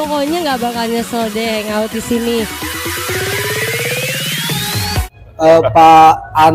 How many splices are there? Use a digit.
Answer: 1